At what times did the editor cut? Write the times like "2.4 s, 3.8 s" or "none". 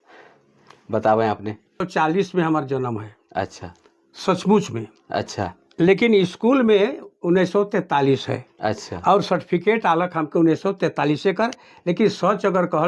1.9 s